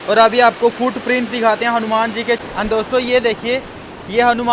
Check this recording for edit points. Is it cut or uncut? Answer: cut